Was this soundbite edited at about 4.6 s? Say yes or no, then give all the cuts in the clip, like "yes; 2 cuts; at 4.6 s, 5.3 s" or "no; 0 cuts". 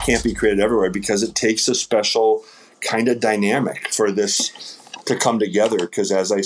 no; 0 cuts